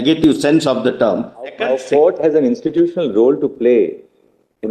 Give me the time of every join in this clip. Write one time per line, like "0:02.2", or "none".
0:01.6